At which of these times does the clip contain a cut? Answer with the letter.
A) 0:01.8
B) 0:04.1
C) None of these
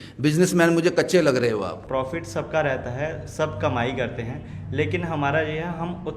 A